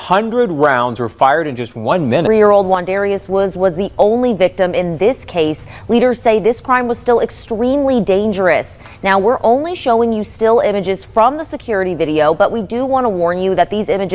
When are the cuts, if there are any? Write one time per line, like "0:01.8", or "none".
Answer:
0:02.2